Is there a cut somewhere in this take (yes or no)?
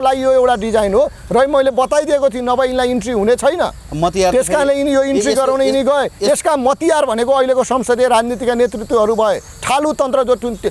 no